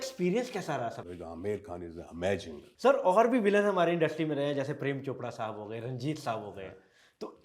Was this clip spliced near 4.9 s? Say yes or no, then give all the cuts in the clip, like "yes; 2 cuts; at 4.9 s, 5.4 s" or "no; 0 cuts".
no; 2 cuts; at 1.0 s, 2.6 s